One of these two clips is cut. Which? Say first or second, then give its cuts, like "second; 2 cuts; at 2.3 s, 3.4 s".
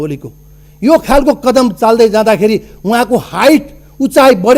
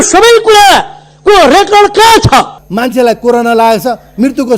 second; 1 cut; at 2.6 s